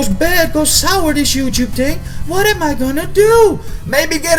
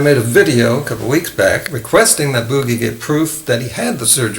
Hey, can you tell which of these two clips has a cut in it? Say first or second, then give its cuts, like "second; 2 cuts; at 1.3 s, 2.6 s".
second; 1 cut; at 1.7 s